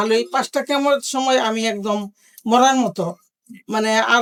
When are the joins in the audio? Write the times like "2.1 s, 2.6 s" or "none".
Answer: none